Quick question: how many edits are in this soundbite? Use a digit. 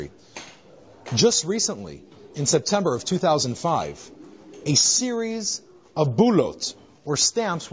1